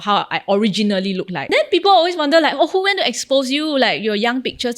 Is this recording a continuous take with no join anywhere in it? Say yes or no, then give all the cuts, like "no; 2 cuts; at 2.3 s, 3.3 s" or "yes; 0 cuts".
no; 1 cut; at 1.4 s